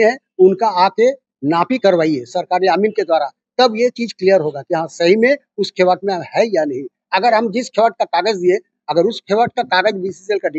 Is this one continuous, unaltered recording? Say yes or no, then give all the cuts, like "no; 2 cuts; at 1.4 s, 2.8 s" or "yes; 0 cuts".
yes; 0 cuts